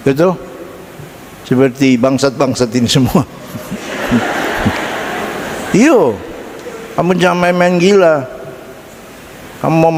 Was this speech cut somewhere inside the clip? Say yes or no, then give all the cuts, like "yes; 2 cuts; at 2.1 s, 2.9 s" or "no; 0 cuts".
no; 0 cuts